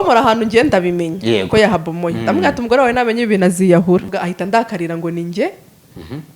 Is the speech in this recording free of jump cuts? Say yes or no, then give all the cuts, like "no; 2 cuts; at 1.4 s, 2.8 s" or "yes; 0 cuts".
no; 1 cut; at 4.1 s